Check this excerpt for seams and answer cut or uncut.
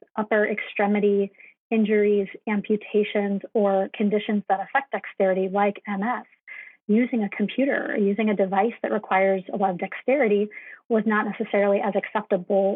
uncut